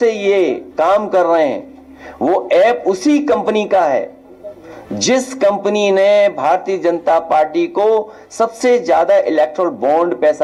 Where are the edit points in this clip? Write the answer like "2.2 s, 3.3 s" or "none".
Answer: none